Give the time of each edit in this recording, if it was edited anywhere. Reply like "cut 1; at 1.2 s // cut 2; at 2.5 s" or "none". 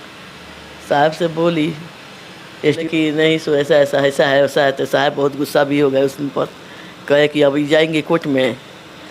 cut 1; at 2.8 s